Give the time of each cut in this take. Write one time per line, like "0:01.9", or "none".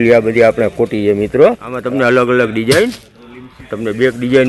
0:01.7